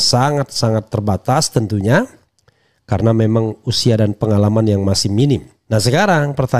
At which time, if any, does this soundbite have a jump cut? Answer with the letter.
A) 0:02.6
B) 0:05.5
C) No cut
B